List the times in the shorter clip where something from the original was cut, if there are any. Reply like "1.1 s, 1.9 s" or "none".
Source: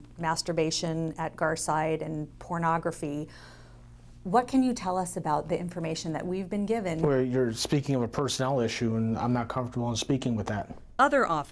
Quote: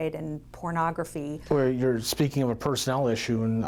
1.5 s